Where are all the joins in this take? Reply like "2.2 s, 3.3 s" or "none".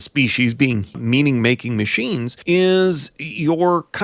1.0 s, 2.4 s